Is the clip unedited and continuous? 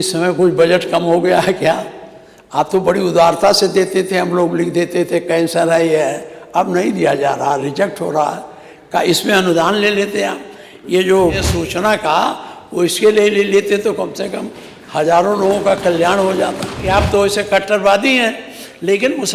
no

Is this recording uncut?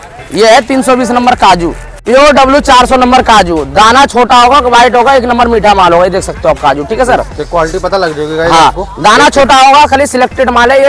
no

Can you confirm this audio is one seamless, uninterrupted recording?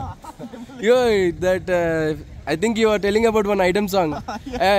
yes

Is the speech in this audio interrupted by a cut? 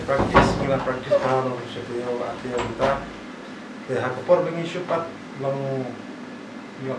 no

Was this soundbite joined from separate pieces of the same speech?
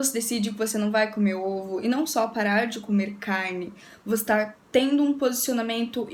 no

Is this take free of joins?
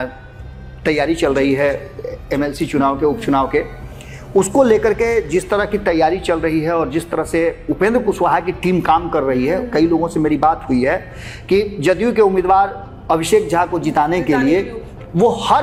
yes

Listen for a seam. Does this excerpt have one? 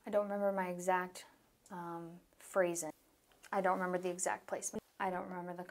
yes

